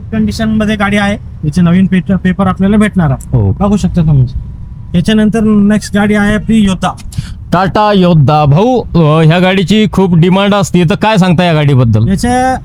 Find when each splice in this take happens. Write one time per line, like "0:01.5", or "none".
none